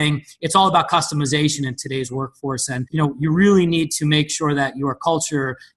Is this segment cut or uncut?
uncut